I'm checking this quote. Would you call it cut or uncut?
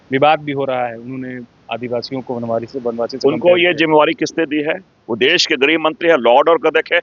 uncut